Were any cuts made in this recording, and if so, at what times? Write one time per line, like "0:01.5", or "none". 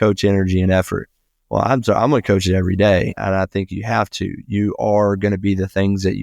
0:03.2